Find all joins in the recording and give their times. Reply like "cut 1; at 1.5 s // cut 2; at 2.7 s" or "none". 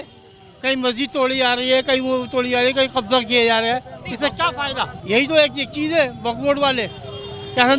cut 1; at 5.0 s